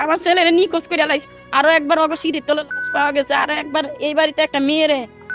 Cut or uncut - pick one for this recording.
cut